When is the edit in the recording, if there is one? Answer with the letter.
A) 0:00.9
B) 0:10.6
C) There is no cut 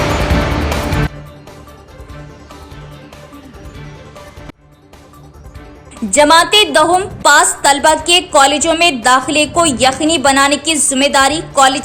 A